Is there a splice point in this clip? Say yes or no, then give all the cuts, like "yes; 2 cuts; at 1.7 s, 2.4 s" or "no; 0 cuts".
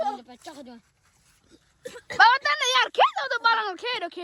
no; 0 cuts